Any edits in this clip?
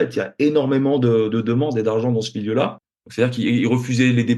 yes; 1 cut; at 2.9 s

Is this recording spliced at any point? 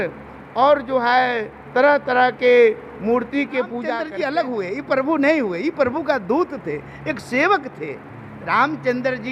yes; 1 cut; at 4.1 s

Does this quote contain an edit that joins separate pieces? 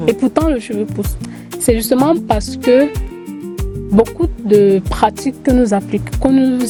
no; 0 cuts

